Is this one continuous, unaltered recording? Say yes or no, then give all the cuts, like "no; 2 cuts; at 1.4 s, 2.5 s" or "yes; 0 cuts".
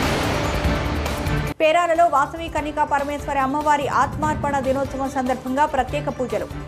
no; 1 cut; at 1.1 s